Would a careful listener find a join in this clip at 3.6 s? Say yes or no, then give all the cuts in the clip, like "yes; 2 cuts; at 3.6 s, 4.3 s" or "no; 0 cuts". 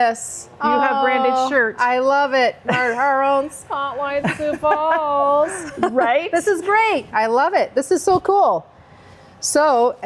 no; 1 cut; at 7.1 s